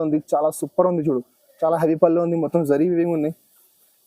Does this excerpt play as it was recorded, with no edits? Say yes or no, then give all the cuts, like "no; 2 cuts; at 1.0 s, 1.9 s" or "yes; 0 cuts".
yes; 0 cuts